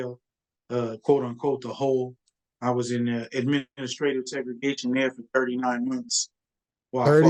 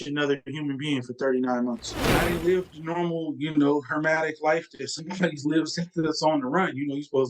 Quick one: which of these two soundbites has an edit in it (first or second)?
second